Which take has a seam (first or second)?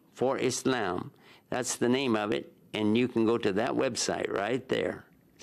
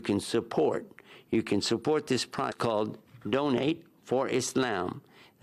second